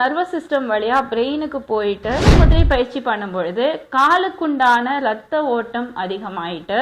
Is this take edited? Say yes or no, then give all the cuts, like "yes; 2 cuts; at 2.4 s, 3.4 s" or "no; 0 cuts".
yes; 1 cut; at 2.3 s